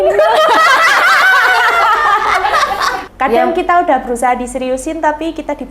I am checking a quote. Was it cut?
yes; 1 cut; at 3.0 s

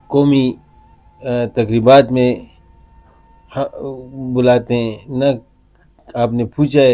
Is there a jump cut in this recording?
no; 0 cuts

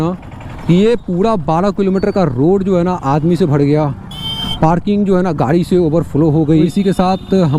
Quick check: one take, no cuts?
no; 1 cut; at 6.7 s

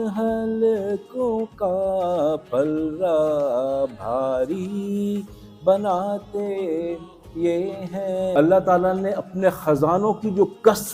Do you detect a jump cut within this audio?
yes; 1 cut; at 8.3 s

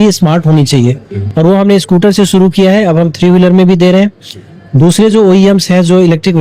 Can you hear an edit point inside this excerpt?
no; 0 cuts

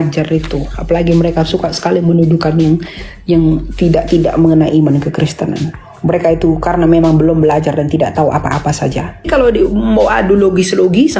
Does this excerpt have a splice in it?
yes; 1 cut; at 9.3 s

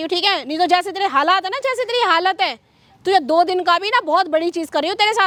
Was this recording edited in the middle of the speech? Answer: no; 0 cuts

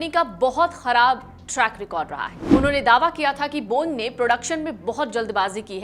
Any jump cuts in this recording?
yes; 1 cut; at 2.5 s

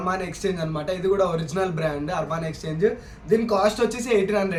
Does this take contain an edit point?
no; 0 cuts

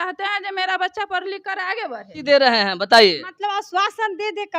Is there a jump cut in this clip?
yes; 1 cut; at 2.2 s

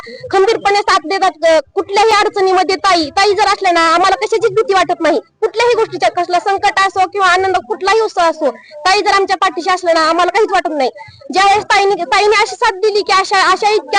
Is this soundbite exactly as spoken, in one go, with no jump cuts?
yes; 0 cuts

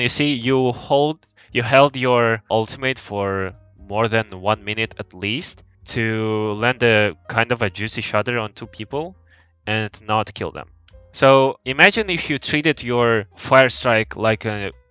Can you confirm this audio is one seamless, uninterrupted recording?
yes; 0 cuts

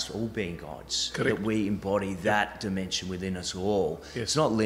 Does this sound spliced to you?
no; 0 cuts

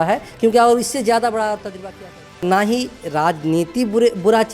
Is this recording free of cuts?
no; 1 cut; at 2.4 s

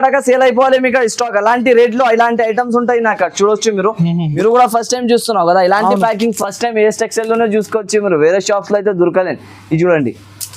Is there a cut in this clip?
yes; 1 cut; at 4.4 s

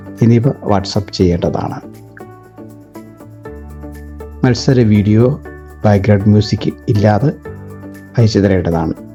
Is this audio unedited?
yes; 0 cuts

